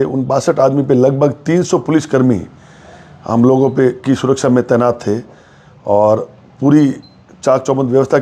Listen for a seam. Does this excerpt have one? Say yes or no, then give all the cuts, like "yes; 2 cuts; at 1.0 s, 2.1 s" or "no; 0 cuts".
no; 0 cuts